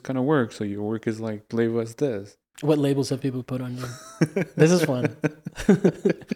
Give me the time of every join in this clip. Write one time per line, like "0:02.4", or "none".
0:02.3